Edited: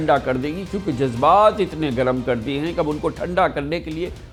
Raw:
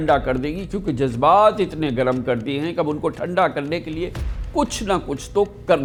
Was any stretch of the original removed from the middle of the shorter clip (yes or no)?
no